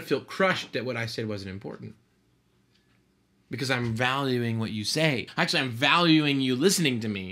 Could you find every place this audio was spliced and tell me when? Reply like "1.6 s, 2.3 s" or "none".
5.3 s